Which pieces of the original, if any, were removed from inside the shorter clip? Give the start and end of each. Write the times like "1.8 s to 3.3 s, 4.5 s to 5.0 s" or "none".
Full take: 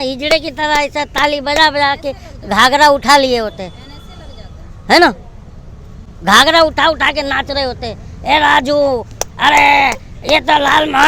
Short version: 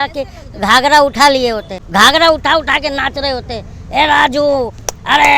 3.6 s to 6.1 s